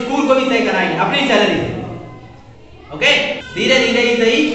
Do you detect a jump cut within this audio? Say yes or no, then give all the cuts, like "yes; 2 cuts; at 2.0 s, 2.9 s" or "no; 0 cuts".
yes; 1 cut; at 3.4 s